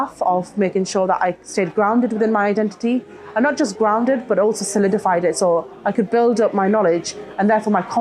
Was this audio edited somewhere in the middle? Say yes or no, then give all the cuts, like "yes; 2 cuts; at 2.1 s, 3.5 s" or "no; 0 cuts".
no; 0 cuts